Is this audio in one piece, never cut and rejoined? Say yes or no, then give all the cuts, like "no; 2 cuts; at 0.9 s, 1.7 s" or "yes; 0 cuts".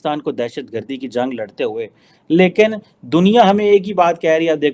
yes; 0 cuts